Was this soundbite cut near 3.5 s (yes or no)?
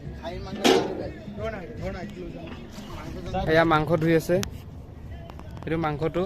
yes